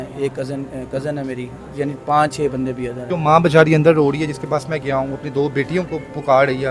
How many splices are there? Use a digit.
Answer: 1